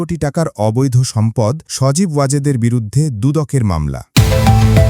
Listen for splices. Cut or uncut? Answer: cut